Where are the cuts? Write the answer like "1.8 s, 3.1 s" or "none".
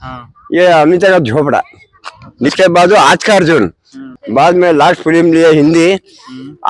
2.5 s, 4.0 s